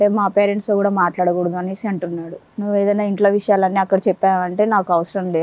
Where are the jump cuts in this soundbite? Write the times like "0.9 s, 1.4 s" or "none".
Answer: 2.4 s